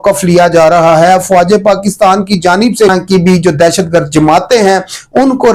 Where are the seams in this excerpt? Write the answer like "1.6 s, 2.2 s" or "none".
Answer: 2.9 s